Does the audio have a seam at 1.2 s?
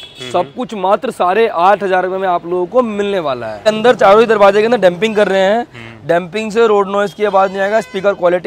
no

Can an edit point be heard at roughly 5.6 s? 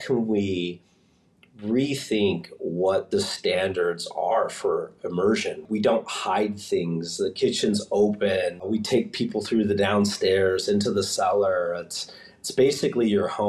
yes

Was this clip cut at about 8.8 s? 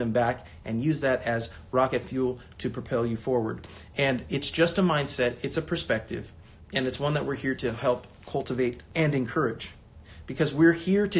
yes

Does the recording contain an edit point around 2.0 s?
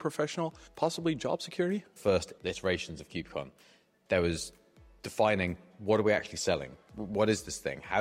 yes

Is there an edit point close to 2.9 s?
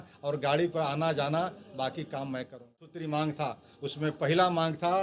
yes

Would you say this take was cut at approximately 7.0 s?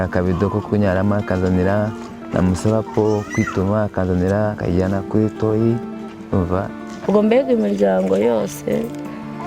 yes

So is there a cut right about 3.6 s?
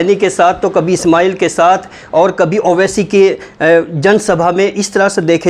no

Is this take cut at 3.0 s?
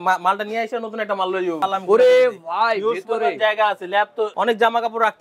no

